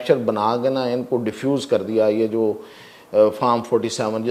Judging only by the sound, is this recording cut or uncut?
uncut